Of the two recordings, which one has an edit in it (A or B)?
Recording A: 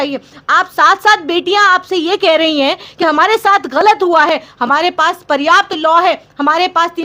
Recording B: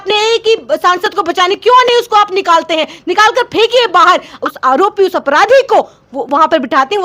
B